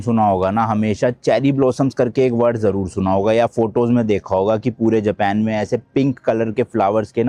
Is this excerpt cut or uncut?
uncut